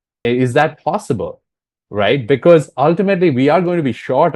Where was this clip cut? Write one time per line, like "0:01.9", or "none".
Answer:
none